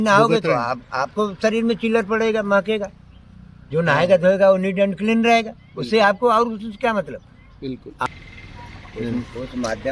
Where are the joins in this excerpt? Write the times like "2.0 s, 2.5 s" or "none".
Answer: 8.1 s